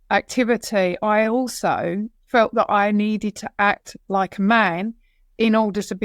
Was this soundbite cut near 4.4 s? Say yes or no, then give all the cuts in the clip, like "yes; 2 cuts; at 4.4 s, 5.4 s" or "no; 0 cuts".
no; 0 cuts